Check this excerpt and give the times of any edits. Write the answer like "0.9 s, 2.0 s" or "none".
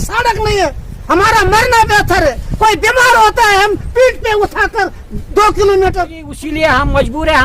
6.3 s

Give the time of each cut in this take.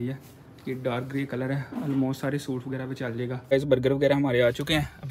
3.5 s

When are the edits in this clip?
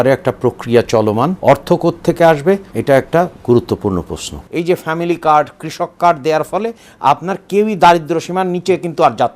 1.4 s, 2.7 s, 4.4 s

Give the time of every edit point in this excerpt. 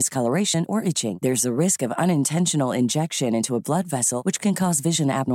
none

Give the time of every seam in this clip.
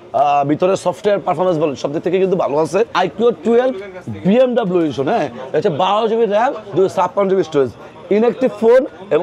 2.9 s

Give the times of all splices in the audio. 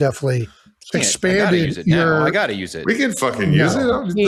none

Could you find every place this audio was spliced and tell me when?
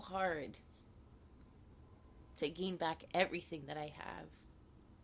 none

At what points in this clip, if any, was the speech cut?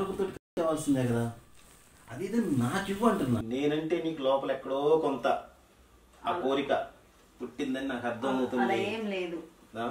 3.4 s

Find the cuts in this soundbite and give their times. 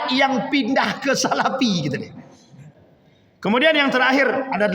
2.7 s

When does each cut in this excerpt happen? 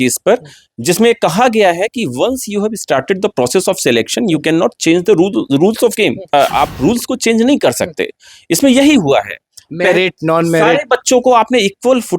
6.3 s

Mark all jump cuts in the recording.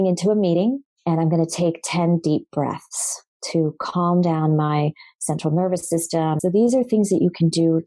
0.9 s, 6.4 s

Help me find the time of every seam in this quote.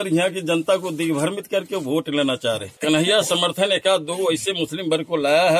2.8 s

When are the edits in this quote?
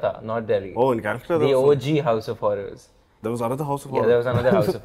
none

